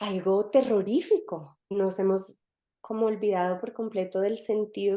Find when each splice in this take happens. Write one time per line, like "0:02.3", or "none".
0:01.7